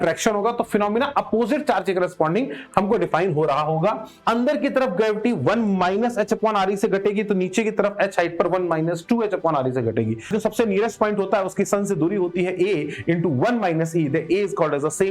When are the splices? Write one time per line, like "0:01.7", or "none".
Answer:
0:04.1
0:10.3